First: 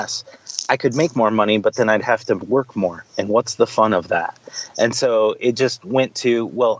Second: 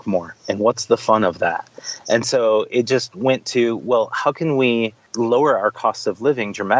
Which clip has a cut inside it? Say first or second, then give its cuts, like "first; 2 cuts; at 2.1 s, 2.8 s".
second; 1 cut; at 5.0 s